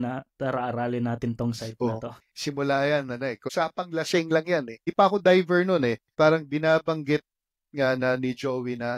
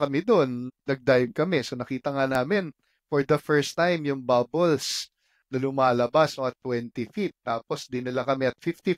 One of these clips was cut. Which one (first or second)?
first